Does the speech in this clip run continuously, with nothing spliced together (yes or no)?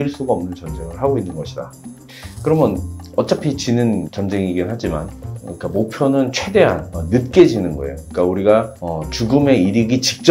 yes